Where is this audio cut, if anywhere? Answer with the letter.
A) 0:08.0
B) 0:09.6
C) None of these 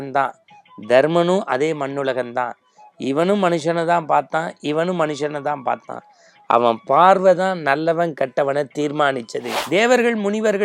B